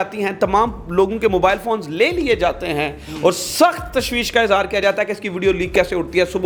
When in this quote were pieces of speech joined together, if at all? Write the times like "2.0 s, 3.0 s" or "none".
none